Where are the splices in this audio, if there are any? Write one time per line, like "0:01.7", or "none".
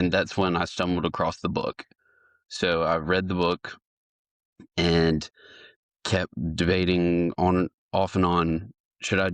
none